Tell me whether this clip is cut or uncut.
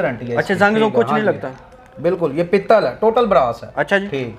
uncut